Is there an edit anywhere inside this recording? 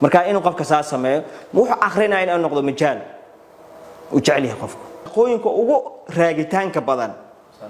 yes; 1 cut; at 5.0 s

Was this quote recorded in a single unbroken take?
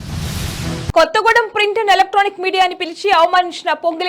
no; 1 cut; at 0.9 s

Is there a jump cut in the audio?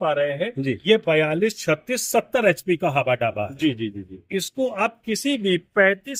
no; 0 cuts

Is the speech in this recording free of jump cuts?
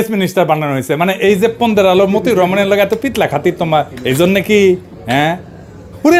yes; 0 cuts

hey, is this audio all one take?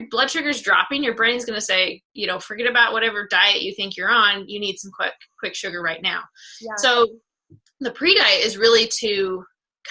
yes; 0 cuts

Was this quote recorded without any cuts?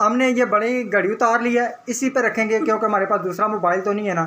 yes; 0 cuts

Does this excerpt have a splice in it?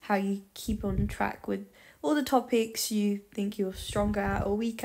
no; 0 cuts

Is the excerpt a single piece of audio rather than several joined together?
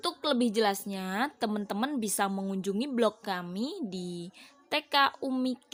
yes; 0 cuts

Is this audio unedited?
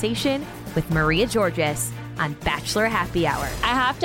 yes; 0 cuts

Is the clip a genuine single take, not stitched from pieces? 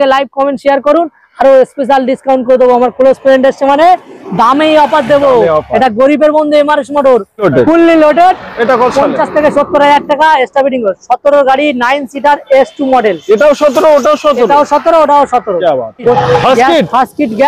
no; 2 cuts; at 7.4 s, 16.2 s

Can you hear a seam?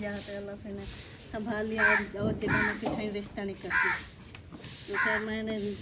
no; 0 cuts

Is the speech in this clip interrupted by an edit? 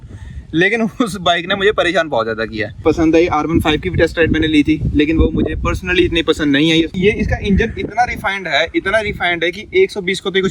yes; 2 cuts; at 2.8 s, 6.9 s

